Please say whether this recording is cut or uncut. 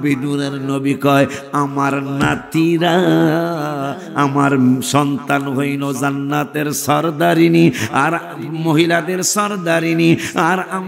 uncut